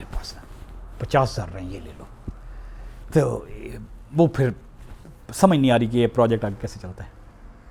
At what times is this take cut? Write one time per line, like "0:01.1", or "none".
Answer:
none